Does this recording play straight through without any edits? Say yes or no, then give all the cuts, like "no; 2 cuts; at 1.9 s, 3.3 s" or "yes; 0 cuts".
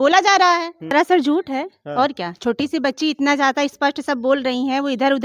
no; 1 cut; at 0.9 s